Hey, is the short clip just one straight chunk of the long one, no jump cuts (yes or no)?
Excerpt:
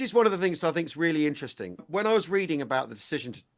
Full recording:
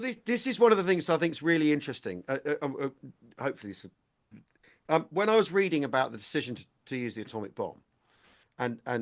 no